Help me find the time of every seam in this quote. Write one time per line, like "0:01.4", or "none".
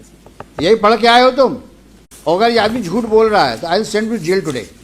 0:01.9

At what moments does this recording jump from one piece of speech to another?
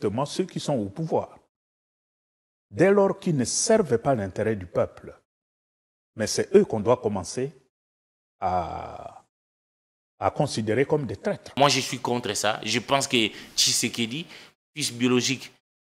0:11.6

